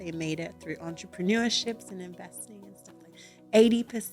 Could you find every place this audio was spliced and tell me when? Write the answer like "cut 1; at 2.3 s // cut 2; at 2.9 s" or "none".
none